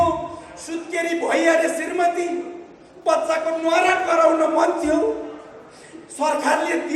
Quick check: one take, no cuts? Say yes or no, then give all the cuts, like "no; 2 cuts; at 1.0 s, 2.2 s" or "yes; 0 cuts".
yes; 0 cuts